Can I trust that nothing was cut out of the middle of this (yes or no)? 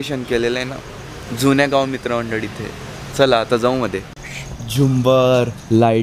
yes